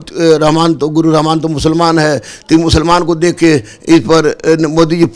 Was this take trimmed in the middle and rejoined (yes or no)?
no